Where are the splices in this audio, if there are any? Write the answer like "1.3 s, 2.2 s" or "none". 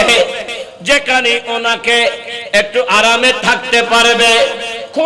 none

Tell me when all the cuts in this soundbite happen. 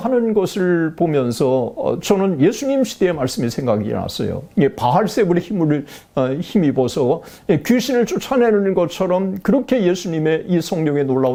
none

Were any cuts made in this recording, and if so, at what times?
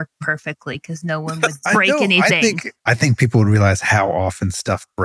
2.8 s

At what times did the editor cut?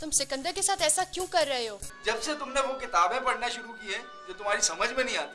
1.9 s

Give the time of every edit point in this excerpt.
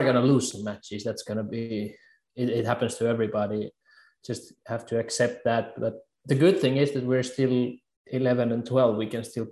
2.2 s

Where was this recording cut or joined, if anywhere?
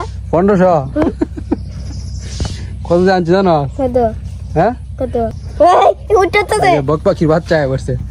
5.4 s

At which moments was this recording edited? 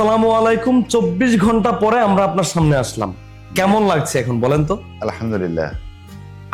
none

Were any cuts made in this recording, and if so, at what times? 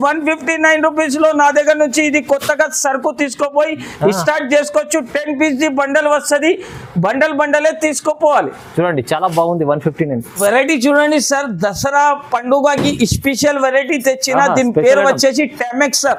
none

